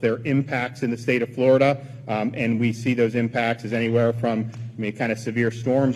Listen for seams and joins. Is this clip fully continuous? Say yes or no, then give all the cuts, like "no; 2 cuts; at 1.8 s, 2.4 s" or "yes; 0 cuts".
yes; 0 cuts